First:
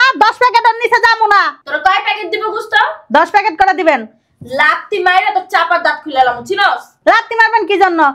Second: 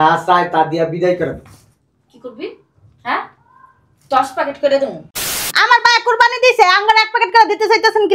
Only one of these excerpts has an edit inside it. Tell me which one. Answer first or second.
second